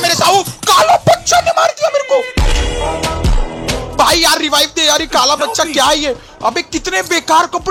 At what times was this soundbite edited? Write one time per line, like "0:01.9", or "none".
none